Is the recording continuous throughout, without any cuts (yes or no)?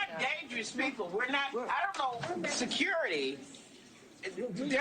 no